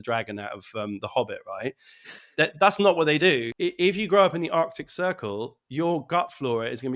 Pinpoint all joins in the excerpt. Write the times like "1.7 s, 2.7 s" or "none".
3.5 s